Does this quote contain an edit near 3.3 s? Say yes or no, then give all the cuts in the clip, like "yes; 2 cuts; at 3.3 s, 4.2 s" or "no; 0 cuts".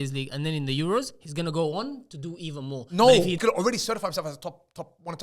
yes; 1 cut; at 3.3 s